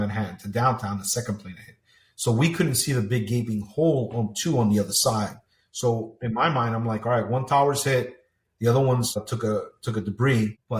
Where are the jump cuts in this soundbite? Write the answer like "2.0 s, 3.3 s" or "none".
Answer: none